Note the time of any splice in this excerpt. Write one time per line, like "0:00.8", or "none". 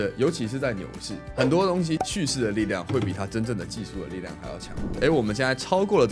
0:04.9